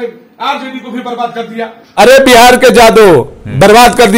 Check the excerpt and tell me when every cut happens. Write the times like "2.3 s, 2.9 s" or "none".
1.9 s

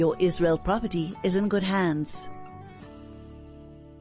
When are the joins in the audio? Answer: 2.1 s

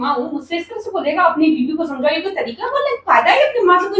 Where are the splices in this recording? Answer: none

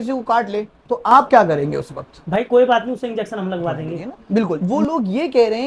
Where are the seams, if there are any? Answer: 4.6 s

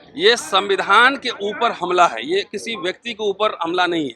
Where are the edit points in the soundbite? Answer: none

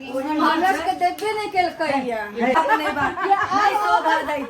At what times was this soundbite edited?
2.5 s

